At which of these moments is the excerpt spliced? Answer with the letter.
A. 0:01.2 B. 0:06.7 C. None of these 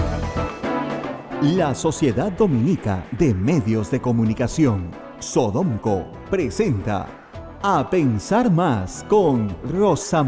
A